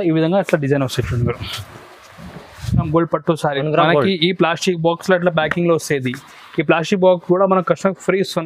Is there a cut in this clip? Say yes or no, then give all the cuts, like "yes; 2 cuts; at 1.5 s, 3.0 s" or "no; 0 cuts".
yes; 1 cut; at 2.9 s